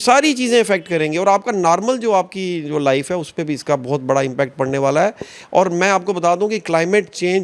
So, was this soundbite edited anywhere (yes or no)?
no